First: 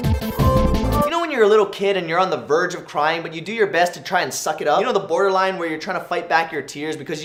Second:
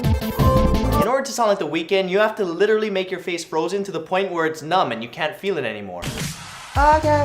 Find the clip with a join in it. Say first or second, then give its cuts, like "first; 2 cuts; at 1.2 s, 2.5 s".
second; 1 cut; at 1.0 s